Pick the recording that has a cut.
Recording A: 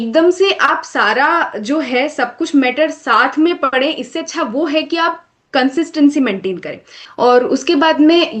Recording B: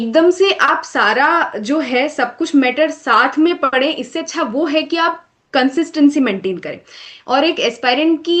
A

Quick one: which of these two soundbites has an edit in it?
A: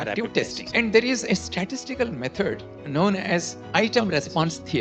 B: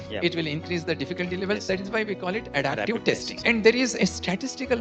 A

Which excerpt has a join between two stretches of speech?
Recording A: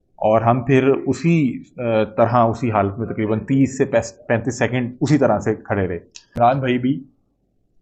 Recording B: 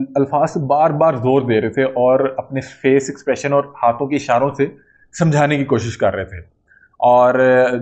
A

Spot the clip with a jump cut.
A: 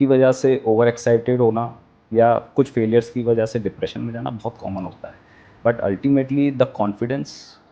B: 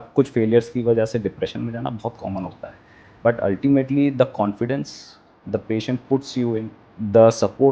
B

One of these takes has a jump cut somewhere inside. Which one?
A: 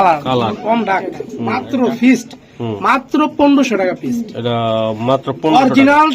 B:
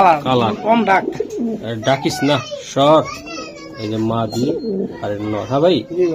A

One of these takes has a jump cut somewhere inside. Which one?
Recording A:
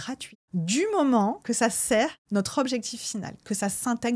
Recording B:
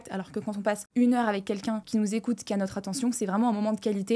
A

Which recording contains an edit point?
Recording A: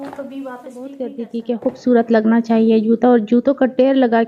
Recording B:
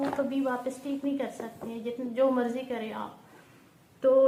A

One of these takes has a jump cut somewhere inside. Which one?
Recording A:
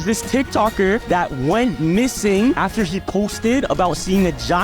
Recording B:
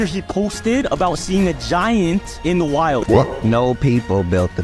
B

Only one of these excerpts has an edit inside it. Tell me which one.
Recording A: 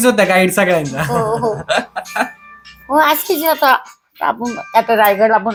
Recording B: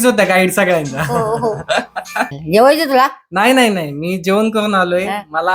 B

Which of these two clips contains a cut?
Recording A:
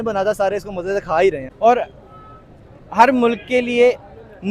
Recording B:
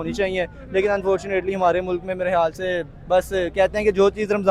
A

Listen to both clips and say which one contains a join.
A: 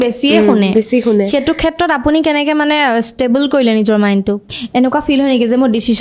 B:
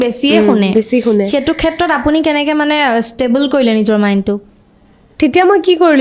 A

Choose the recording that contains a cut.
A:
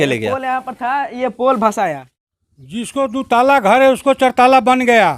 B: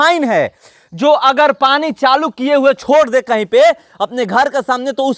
A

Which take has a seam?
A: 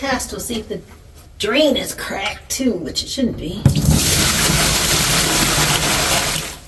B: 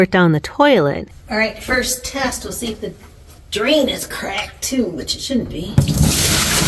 B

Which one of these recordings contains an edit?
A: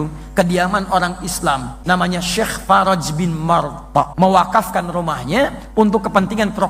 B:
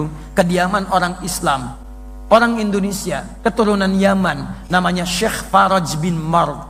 A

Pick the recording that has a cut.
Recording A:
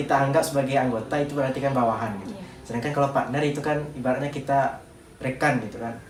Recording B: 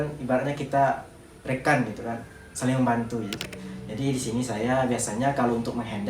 B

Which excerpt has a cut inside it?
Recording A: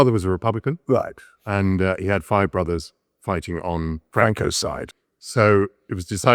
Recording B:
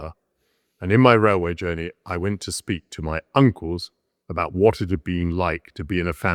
A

